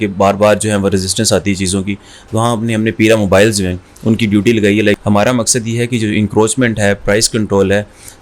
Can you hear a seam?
yes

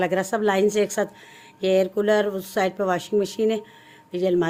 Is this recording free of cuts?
yes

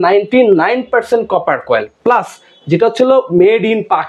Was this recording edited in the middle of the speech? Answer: no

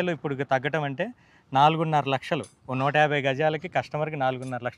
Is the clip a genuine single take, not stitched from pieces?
yes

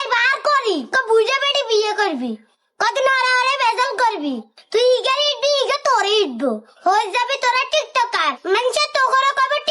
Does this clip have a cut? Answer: no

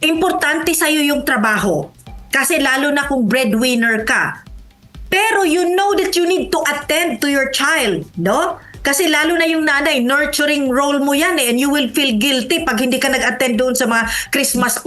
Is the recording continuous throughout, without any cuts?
yes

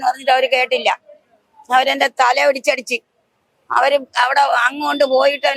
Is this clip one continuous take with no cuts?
yes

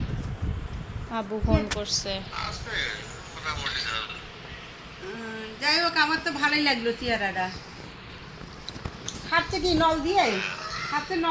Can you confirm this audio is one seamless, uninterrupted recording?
yes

